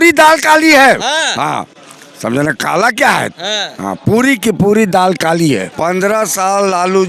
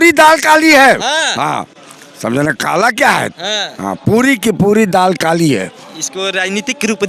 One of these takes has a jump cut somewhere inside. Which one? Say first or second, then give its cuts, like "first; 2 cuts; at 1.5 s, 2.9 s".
first; 1 cut; at 5.7 s